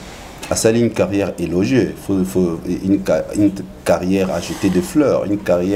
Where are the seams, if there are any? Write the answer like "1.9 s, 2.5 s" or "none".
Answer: none